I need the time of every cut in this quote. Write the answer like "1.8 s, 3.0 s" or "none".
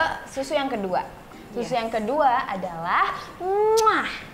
none